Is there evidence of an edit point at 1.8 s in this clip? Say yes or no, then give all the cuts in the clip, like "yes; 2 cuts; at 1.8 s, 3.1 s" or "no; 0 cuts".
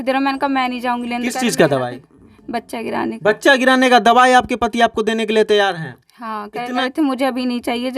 no; 1 cut; at 6.8 s